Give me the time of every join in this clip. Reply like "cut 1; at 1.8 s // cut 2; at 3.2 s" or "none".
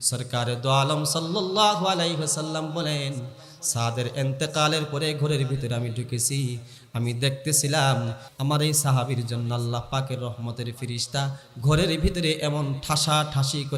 cut 1; at 8.3 s